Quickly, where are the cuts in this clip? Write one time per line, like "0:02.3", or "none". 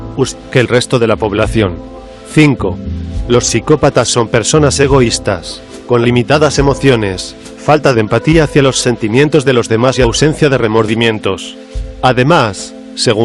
0:04.6